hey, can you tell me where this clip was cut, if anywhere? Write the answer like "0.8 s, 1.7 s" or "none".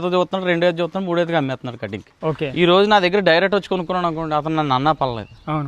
2.5 s